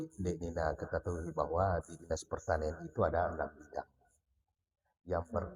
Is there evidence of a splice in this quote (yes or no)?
no